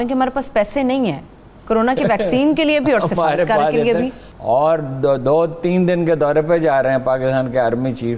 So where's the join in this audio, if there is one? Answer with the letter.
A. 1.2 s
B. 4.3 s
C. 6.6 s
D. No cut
B